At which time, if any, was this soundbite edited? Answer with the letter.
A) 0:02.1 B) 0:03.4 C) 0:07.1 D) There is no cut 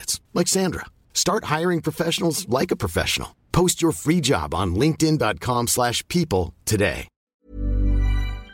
C